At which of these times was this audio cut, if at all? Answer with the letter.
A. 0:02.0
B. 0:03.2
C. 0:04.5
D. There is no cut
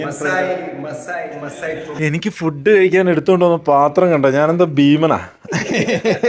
A